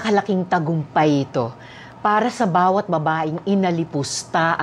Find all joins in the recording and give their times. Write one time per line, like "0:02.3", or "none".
none

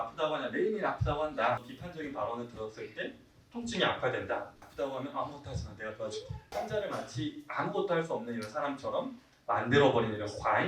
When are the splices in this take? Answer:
0:01.8
0:04.6

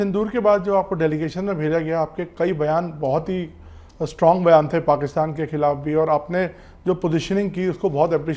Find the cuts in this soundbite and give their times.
none

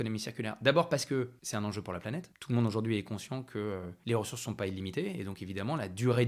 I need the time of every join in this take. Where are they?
0:01.4
0:02.3
0:03.9

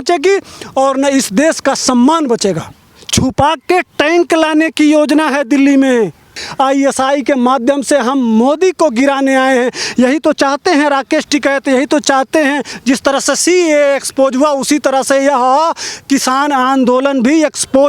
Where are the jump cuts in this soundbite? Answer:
0:02.7
0:06.4
0:12.7

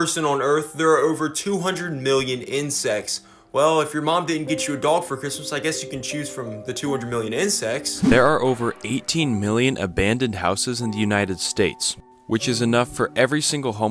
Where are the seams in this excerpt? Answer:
0:08.1

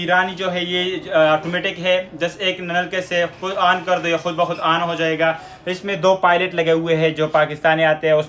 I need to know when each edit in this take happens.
none

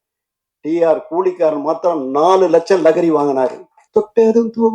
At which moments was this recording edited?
0:03.7

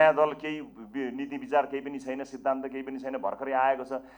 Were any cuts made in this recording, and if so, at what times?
none

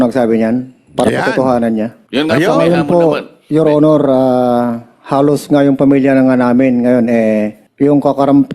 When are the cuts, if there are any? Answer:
0:02.0
0:07.6

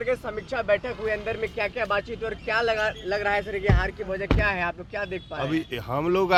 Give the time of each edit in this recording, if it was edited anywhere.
none

